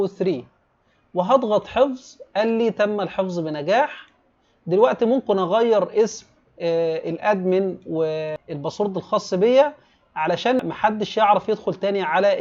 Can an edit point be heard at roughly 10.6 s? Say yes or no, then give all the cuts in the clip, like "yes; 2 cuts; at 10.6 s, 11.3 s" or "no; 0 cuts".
yes; 2 cuts; at 8.4 s, 10.6 s